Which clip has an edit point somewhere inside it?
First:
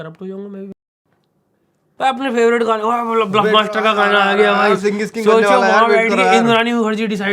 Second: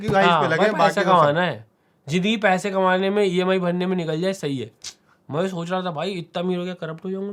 first; 1 cut; at 1.9 s

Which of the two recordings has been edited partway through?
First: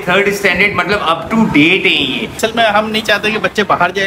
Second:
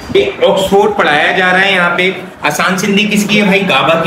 first; 1 cut; at 2.4 s

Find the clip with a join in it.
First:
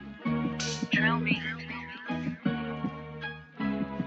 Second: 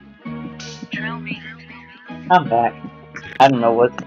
first; 1 cut; at 2.2 s

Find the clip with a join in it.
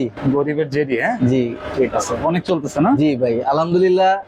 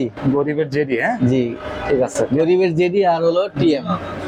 first; 1 cut; at 1.6 s

